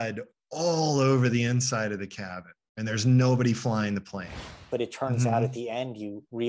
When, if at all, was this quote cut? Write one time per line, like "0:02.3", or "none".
0:04.6

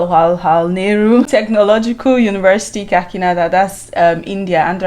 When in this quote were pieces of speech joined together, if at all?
0:01.3

